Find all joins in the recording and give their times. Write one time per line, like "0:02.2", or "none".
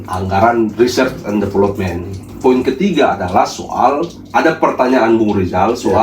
0:02.3